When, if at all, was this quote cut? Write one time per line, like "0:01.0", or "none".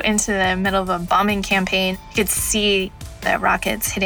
0:01.0
0:02.1